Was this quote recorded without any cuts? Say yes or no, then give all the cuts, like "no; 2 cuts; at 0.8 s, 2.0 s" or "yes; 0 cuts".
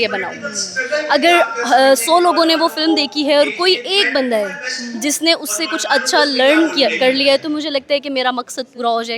yes; 0 cuts